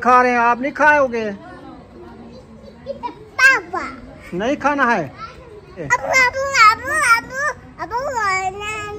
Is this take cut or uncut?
cut